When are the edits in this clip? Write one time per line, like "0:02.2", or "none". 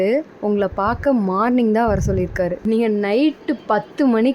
0:02.6